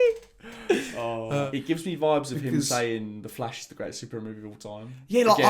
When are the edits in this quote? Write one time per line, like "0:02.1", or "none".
0:01.5